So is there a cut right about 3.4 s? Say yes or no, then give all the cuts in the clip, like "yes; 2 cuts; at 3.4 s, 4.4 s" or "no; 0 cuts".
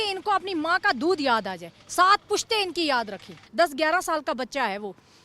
yes; 1 cut; at 3.4 s